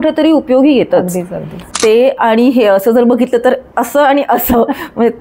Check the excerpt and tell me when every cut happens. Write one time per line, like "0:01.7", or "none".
0:01.6

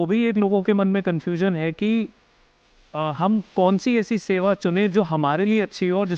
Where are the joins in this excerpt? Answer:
none

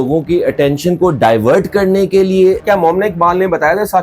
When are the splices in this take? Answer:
0:02.6

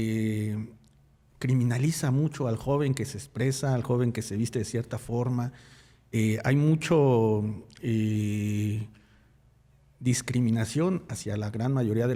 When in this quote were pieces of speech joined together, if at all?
none

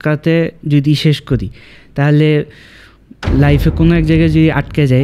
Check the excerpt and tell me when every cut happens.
none

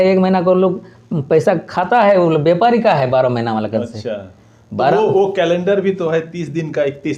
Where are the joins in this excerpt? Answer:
none

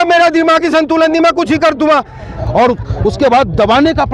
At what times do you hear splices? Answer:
0:02.3

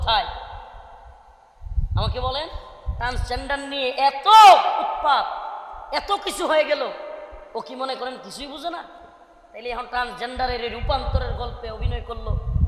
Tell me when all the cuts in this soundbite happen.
none

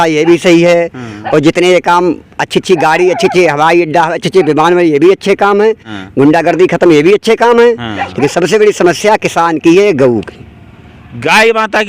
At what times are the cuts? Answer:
none

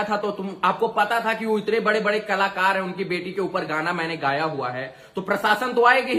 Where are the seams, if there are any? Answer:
none

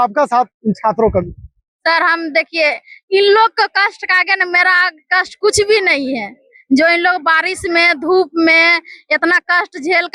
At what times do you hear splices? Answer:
none

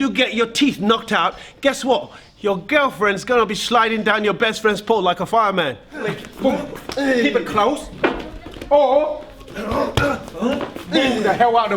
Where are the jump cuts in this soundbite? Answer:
0:06.2

